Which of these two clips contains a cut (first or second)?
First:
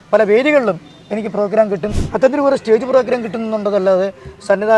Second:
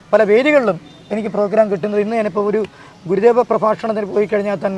first